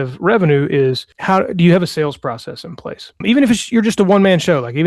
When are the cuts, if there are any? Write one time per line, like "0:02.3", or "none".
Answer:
0:01.1
0:03.2